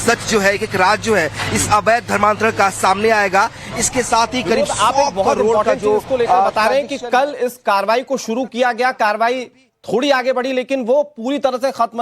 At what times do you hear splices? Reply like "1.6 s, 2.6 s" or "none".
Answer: 3.1 s